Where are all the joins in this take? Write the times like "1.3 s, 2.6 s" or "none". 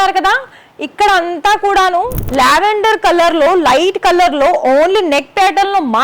2.2 s

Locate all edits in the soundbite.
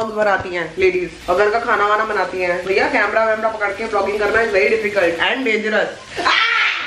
none

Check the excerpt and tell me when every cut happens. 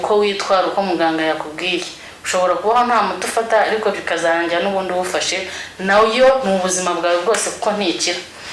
none

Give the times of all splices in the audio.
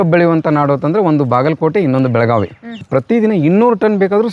2.8 s

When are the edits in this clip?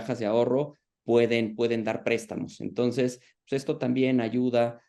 none

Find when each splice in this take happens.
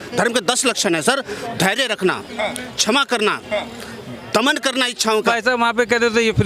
5.3 s

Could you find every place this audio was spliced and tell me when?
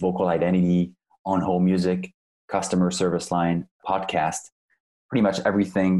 3.8 s

